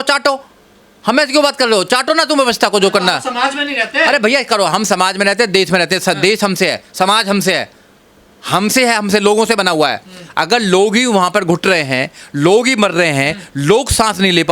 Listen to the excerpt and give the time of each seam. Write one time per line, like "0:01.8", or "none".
none